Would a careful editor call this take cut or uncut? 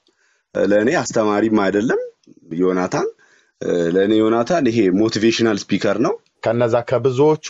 cut